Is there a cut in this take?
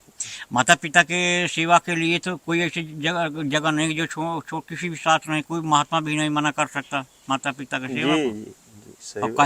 no; 0 cuts

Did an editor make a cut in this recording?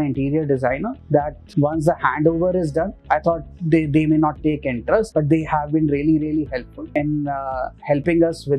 yes; 4 cuts; at 1.1 s, 3.0 s, 5.1 s, 6.8 s

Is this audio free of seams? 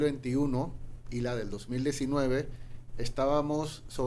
yes; 0 cuts

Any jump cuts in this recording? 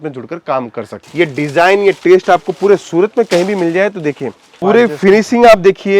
yes; 2 cuts; at 1.0 s, 4.5 s

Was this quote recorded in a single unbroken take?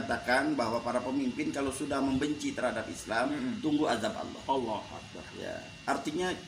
yes; 0 cuts

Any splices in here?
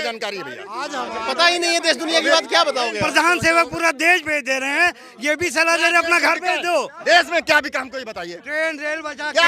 yes; 1 cut; at 3.1 s

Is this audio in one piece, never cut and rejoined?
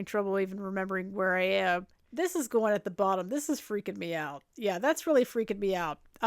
no; 1 cut; at 1.9 s

